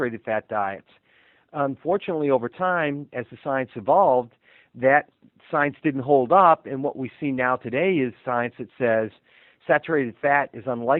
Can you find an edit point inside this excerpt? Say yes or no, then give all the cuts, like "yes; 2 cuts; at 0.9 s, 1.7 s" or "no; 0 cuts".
no; 0 cuts